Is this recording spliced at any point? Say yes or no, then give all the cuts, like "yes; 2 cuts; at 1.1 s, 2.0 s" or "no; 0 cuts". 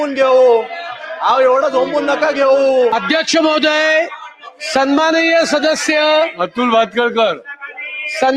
yes; 1 cut; at 2.9 s